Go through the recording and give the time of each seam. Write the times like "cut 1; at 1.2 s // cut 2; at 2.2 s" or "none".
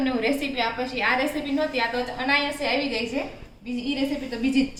none